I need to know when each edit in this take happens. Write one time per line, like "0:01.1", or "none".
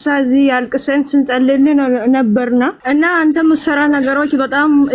0:02.8